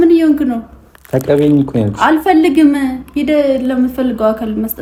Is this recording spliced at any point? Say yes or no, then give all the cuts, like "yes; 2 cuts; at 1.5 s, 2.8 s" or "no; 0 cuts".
no; 0 cuts